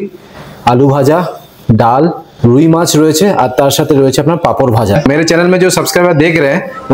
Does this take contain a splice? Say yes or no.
yes